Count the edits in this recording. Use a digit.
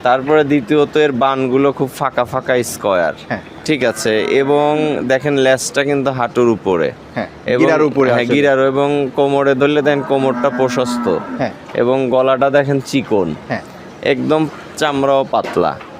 0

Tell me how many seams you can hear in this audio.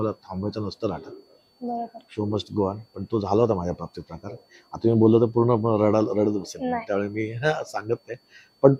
0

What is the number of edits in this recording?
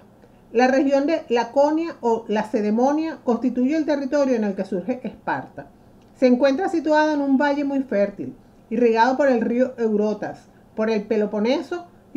0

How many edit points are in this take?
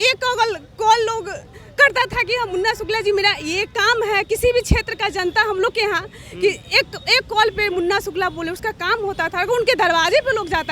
0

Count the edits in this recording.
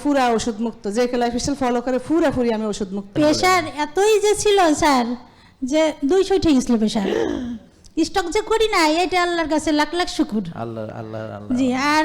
1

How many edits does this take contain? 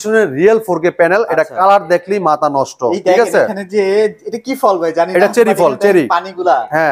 0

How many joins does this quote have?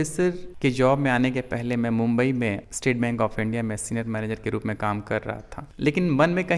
0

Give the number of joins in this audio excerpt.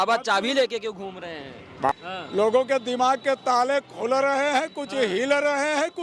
1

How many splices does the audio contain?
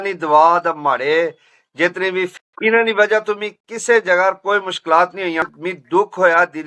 2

